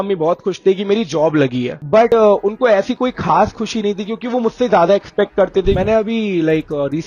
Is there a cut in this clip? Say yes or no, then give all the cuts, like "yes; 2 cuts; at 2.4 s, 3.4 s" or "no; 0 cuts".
yes; 1 cut; at 5.8 s